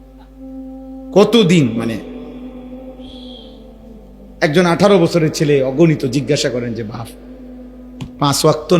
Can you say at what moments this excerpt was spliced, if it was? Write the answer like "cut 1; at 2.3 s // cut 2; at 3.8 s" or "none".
cut 1; at 1.1 s